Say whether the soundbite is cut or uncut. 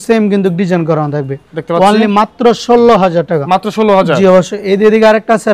uncut